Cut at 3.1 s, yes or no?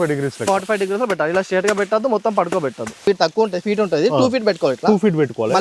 yes